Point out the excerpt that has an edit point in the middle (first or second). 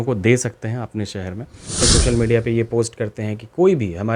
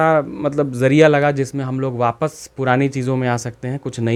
first